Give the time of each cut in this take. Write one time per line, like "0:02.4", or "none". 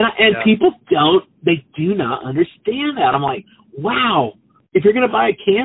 0:04.5